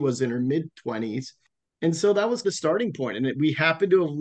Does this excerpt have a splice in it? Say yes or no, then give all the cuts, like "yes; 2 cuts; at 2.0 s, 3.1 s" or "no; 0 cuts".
yes; 1 cut; at 1.3 s